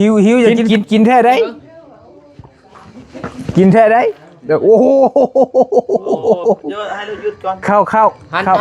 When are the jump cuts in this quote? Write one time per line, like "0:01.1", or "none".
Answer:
0:07.6